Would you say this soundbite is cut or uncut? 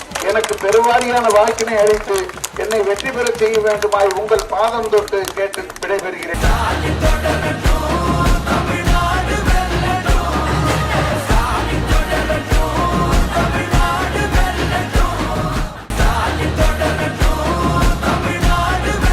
cut